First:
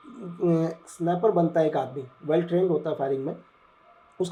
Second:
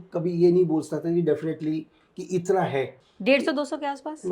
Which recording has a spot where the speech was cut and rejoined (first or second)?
second